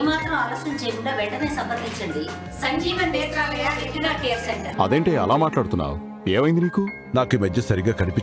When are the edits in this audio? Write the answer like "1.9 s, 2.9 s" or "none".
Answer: 4.7 s

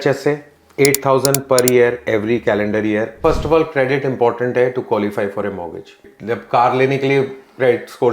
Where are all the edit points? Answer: 3.2 s, 6.0 s

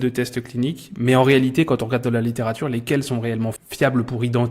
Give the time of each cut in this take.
3.6 s

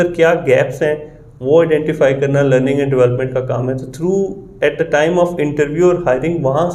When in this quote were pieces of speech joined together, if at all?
none

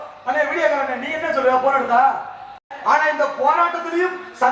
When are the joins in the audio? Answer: 2.6 s

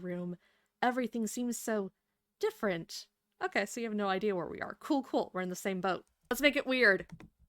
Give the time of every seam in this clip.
6.1 s

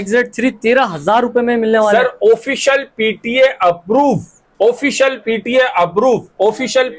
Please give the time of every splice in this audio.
none

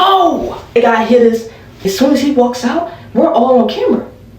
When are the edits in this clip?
0.8 s, 1.8 s

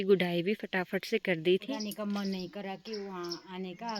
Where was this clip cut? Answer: 1.6 s

